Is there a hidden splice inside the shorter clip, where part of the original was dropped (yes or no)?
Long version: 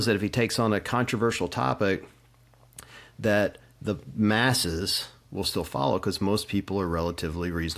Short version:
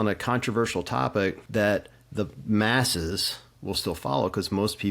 yes